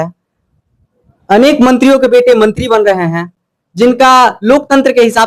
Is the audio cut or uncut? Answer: uncut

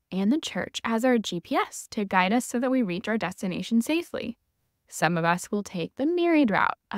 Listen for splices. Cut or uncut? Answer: uncut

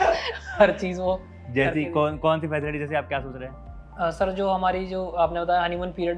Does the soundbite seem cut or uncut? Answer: uncut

